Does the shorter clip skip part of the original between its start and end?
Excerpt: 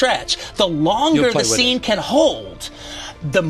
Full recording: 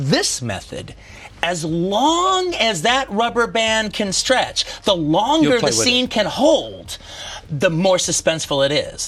no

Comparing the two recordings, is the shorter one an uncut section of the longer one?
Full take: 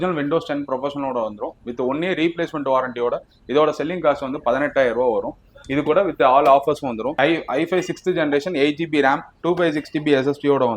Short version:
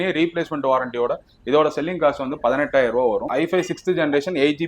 no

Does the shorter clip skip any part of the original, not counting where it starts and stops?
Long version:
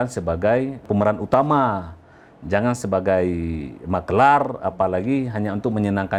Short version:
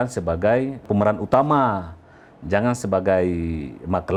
no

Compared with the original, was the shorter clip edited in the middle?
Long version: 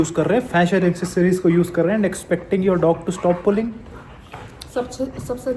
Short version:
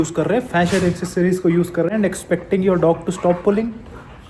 no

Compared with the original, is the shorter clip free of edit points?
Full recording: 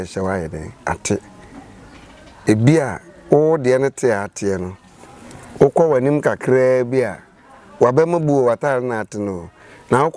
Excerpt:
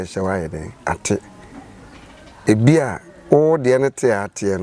yes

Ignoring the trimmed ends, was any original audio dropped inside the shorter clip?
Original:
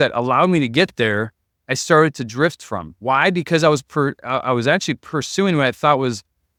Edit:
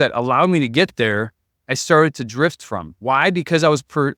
no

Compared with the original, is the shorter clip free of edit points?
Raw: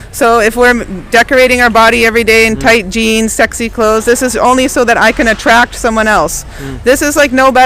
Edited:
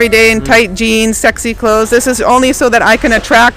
yes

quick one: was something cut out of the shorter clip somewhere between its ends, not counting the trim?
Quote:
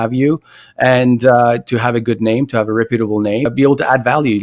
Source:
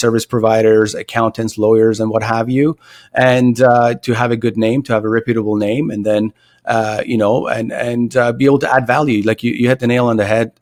yes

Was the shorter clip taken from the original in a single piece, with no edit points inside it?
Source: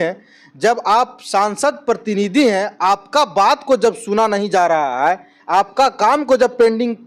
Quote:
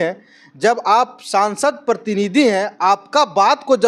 yes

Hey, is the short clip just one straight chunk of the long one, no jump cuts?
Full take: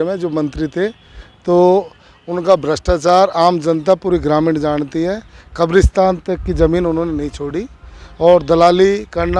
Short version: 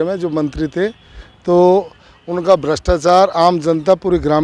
yes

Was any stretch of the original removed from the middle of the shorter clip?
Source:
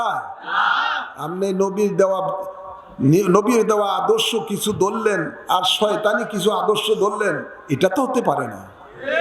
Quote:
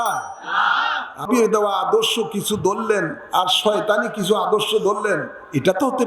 yes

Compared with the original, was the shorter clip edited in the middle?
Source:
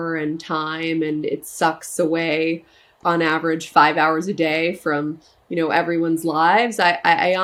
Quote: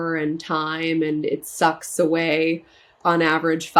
no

